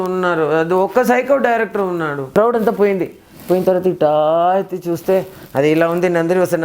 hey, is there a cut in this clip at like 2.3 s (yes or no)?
yes